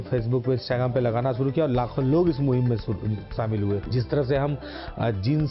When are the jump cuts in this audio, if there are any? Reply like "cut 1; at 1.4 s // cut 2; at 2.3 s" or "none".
cut 1; at 3.9 s